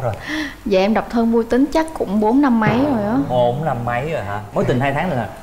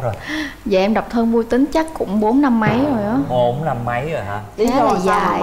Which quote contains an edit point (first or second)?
first